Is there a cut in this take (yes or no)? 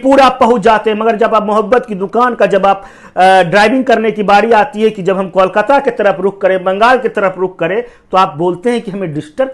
no